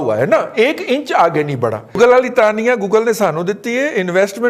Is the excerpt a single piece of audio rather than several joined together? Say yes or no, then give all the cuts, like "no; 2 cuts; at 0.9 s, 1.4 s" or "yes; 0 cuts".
no; 1 cut; at 1.9 s